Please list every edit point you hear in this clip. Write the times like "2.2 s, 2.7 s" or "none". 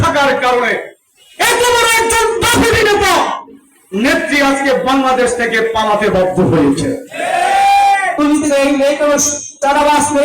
8.2 s